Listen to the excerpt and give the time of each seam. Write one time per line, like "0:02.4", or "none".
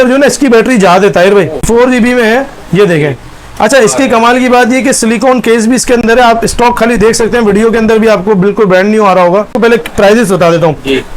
0:01.7
0:06.0
0:09.5